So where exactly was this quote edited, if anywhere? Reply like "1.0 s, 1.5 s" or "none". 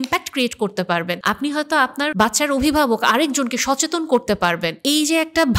1.2 s, 2.1 s, 4.8 s